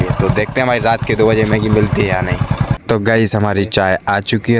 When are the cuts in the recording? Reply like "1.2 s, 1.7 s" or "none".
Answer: 2.8 s